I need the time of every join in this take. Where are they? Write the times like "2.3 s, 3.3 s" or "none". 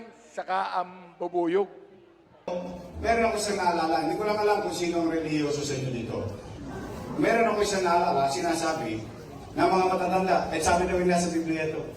2.5 s